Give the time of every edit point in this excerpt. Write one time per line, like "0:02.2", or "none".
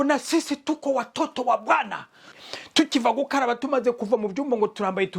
0:02.3